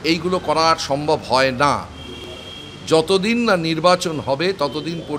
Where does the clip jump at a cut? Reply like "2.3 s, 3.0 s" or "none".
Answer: none